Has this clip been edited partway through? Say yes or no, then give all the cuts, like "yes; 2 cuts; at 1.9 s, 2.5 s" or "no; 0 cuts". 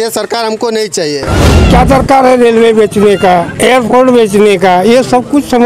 yes; 2 cuts; at 1.4 s, 3.5 s